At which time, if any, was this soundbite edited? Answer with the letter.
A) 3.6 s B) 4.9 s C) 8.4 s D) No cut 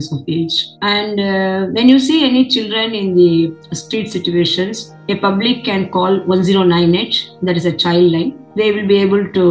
C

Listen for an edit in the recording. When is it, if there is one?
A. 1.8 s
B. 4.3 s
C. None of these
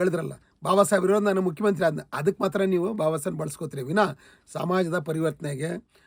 C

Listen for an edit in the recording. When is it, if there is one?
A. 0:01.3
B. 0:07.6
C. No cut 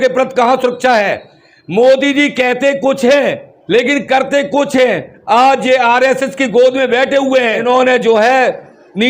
B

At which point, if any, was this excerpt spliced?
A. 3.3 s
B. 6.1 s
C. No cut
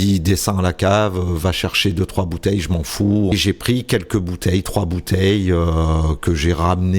A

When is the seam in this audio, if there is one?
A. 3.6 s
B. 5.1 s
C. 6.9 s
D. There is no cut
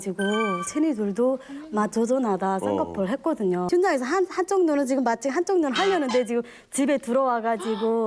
A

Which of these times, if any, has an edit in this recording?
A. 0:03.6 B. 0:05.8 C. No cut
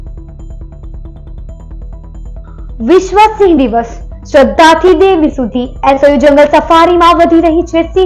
C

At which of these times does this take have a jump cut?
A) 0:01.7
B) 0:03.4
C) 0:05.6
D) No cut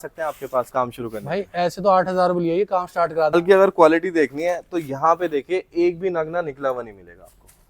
B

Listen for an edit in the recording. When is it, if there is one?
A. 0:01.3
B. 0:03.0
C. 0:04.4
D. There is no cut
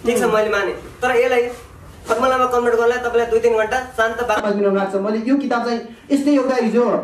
C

